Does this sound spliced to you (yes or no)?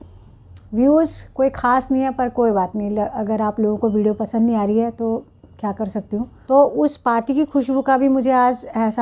yes